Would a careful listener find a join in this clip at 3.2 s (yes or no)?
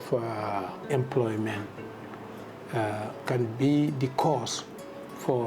yes